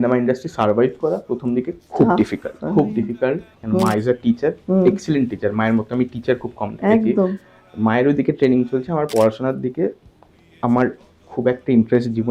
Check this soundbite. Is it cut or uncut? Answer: cut